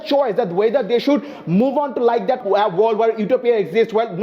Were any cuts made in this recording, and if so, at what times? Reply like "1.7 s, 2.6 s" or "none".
2.4 s